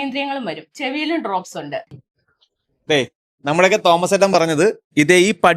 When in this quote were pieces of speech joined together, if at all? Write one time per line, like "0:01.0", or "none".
0:01.8